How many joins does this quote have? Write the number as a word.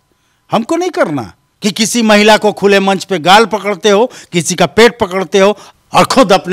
two